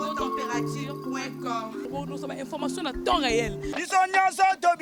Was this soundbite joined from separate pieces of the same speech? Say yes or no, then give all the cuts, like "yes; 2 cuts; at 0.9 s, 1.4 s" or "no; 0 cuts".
no; 0 cuts